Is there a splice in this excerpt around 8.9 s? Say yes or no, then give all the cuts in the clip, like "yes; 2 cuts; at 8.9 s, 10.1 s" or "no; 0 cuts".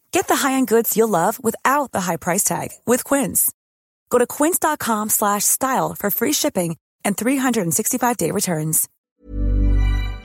yes; 1 cut; at 8.9 s